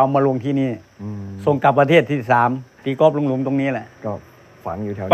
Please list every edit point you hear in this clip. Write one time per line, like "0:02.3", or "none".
none